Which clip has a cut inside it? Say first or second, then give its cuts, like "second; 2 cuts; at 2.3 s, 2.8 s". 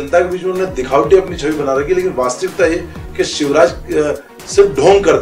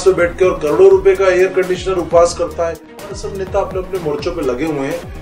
second; 1 cut; at 3.1 s